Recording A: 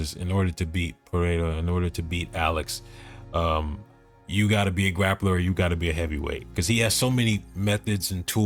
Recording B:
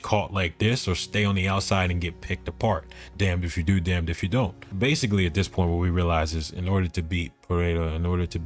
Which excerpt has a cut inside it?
B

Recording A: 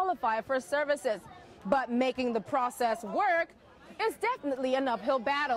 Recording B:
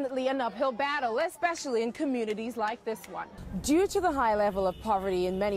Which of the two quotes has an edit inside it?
B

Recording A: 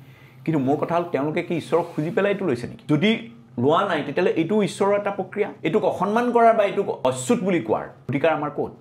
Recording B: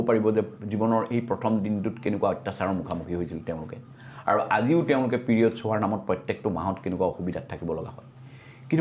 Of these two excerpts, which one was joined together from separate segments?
A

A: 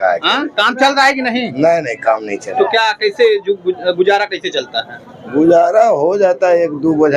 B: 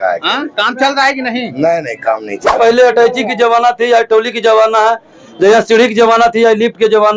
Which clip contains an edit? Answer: B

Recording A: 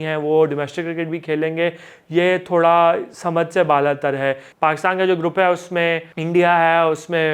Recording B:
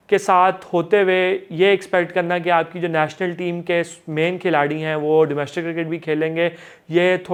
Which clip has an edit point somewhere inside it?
A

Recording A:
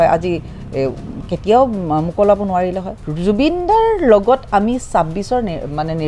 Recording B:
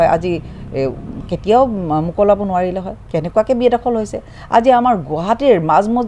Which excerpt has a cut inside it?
A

